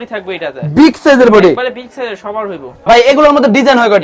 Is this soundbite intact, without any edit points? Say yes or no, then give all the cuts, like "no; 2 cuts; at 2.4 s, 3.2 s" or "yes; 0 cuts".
no; 1 cut; at 2.7 s